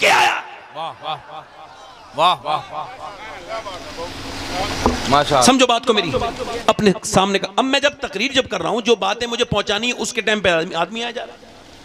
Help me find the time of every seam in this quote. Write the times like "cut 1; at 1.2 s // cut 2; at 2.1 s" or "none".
cut 1; at 6.5 s